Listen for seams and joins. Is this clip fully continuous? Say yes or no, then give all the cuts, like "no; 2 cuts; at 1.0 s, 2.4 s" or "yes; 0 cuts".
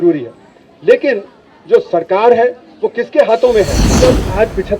no; 1 cut; at 3.8 s